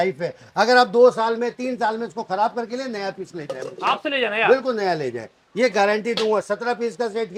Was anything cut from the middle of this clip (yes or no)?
no